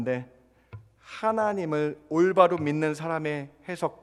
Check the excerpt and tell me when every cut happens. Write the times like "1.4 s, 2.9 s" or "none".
none